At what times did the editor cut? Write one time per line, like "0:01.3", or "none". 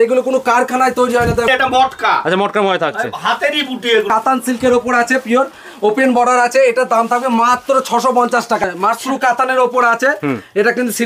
0:01.5
0:04.1
0:08.7